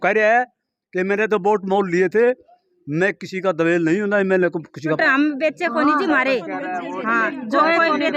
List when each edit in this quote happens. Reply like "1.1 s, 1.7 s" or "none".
5.0 s